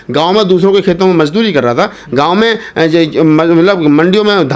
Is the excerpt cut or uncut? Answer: uncut